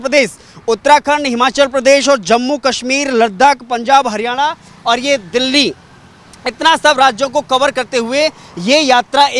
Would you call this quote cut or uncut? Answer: uncut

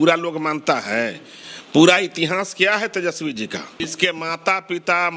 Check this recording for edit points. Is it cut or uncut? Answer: cut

